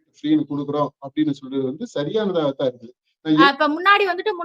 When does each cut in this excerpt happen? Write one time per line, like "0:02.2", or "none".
0:03.4

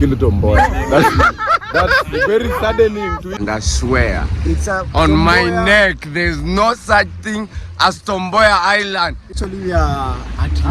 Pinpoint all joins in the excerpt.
0:03.4
0:09.3

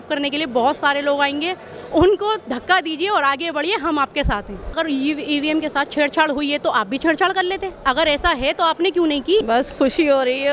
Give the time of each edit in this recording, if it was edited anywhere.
0:04.7
0:09.4

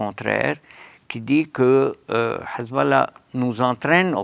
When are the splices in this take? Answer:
none

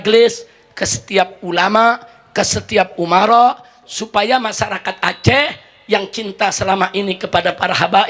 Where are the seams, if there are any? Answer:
none

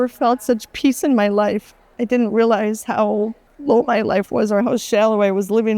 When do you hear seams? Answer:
0:01.9
0:03.5

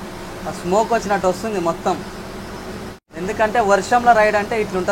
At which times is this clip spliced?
0:03.1

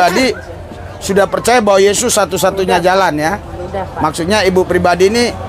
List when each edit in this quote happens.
none

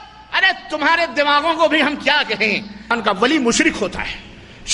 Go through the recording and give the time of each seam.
0:02.9

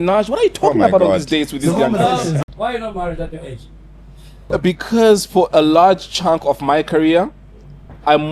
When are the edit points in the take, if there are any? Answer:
0:02.4
0:04.4

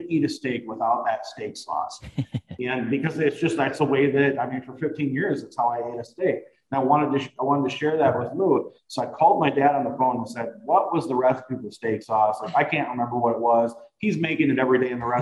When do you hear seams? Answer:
none

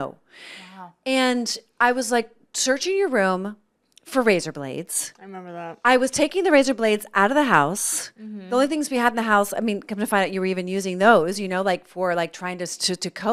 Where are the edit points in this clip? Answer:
none

